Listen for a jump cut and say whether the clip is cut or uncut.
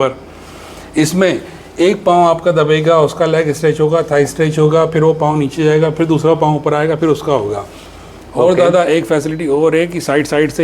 uncut